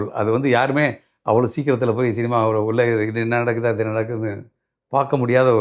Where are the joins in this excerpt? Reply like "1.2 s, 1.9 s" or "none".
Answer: none